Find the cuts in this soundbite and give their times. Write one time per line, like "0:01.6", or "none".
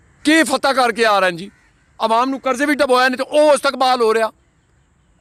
none